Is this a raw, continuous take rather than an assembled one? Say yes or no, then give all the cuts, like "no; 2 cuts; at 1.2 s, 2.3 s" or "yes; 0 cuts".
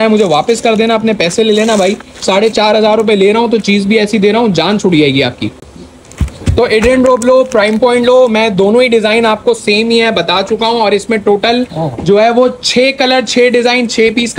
yes; 0 cuts